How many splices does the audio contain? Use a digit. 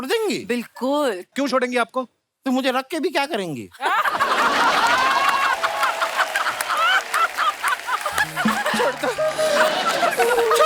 1